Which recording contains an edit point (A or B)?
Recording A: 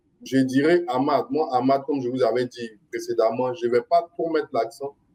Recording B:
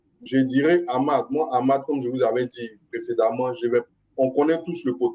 B